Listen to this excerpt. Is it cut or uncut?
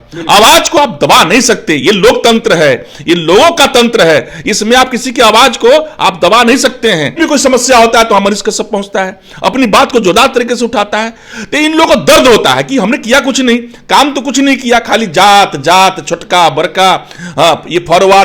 cut